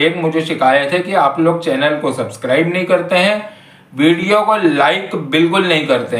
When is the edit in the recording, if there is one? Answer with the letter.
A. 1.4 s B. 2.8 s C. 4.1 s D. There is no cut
D